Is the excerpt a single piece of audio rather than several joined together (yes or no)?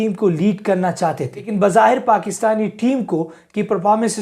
no